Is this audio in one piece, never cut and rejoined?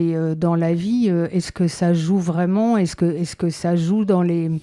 yes; 0 cuts

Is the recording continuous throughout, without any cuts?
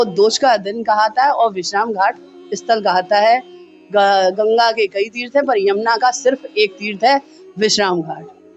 yes; 0 cuts

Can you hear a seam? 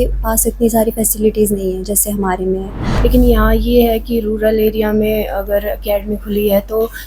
yes; 1 cut; at 2.8 s

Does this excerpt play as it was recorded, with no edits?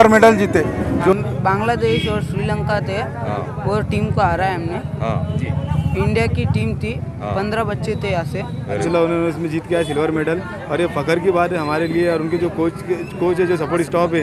no; 2 cuts; at 1.1 s, 8.8 s

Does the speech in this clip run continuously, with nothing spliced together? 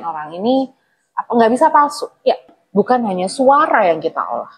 no; 1 cut; at 2.5 s

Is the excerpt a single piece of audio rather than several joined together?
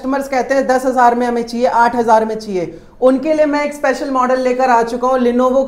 yes; 0 cuts

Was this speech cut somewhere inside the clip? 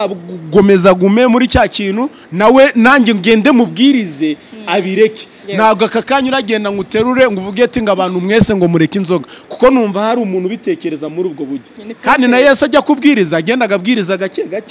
no; 0 cuts

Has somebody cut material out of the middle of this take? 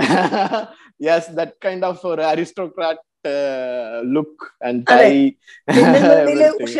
no; 0 cuts

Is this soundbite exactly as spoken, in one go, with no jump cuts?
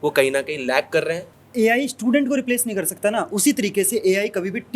no; 1 cut; at 1.3 s

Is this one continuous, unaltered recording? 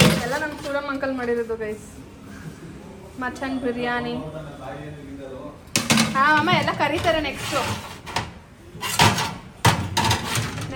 yes; 0 cuts

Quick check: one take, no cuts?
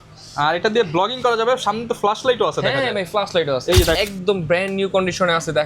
no; 1 cut; at 4.0 s

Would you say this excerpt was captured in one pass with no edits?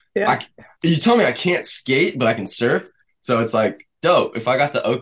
no; 1 cut; at 3.0 s

